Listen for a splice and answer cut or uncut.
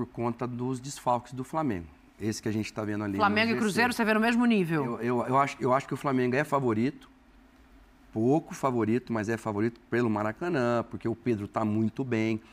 uncut